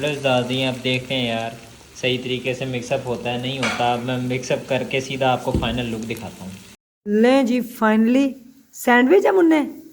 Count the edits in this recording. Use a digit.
1